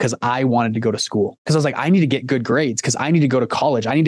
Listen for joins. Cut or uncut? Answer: cut